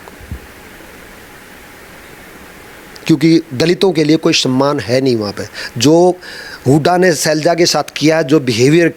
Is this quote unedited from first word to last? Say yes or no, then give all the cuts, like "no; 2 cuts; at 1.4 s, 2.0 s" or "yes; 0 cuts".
yes; 0 cuts